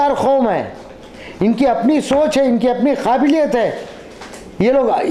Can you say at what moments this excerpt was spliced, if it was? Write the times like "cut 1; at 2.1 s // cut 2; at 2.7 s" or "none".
none